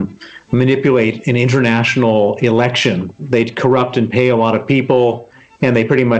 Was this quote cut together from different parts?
yes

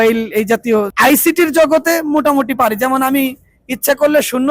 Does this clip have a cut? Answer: yes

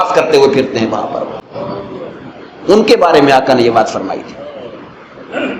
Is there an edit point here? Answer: no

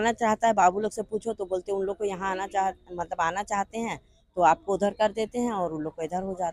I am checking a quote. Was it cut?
no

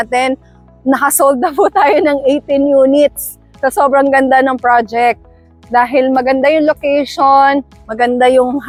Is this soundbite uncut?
yes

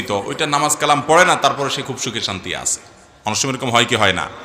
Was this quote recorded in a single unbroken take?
yes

